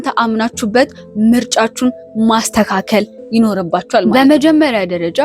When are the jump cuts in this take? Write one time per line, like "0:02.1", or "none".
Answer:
0:04.0